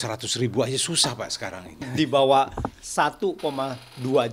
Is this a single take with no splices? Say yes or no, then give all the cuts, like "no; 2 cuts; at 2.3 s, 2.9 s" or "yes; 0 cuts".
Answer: no; 1 cut; at 1.9 s